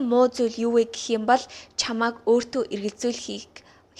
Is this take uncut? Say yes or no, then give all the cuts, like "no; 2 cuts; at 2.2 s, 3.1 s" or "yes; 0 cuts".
yes; 0 cuts